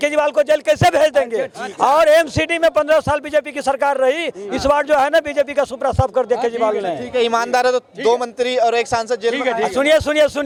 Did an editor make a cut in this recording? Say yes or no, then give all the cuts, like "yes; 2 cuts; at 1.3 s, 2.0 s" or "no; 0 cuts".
no; 0 cuts